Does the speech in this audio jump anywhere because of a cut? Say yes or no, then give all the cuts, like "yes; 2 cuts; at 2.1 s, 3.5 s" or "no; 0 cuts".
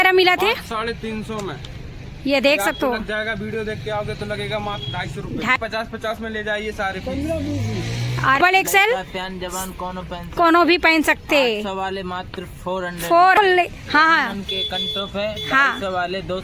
yes; 3 cuts; at 5.6 s, 8.4 s, 13.4 s